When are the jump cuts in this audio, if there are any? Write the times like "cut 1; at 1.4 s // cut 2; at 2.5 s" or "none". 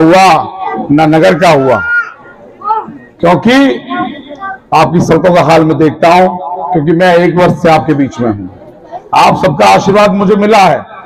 none